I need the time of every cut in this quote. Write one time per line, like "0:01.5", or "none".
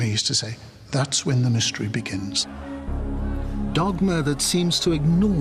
0:01.6